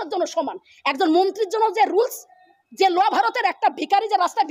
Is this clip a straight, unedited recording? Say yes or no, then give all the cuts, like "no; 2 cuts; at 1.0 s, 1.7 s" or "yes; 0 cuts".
yes; 0 cuts